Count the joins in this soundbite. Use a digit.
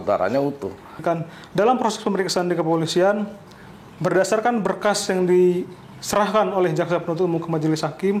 1